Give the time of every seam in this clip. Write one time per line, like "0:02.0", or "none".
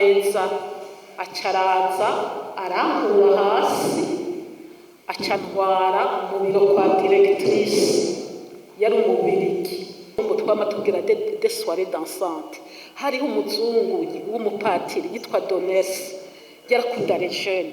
0:10.2